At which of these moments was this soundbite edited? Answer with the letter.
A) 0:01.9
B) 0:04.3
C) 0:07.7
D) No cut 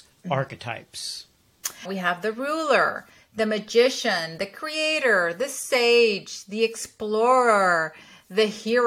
A